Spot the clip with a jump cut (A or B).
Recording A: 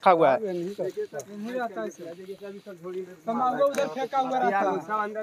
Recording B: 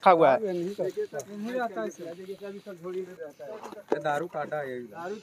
B